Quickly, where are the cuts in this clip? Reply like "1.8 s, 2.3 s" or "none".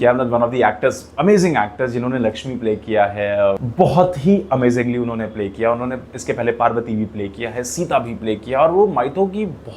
3.6 s